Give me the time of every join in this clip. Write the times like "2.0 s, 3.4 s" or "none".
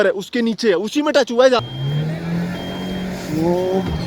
1.6 s